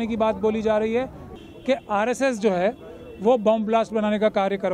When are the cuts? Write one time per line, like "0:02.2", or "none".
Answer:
0:01.3